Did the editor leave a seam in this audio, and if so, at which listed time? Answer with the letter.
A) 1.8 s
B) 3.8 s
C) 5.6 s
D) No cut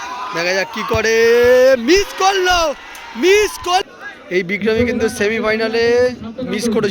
B